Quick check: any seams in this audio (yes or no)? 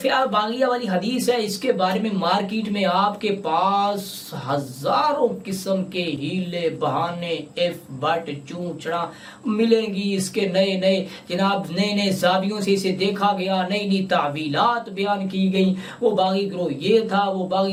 no